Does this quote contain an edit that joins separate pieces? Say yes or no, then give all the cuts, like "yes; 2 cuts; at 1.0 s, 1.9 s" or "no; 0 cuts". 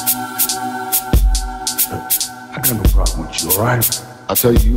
no; 0 cuts